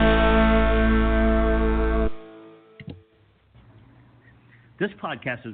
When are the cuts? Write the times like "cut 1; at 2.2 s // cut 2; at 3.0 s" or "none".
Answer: cut 1; at 2.9 s